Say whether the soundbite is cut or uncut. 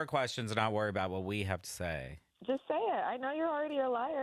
uncut